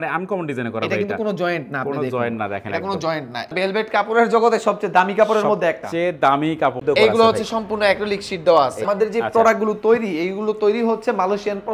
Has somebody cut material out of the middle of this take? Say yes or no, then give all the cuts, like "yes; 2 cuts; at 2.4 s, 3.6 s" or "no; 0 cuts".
yes; 3 cuts; at 3.5 s, 6.8 s, 8.8 s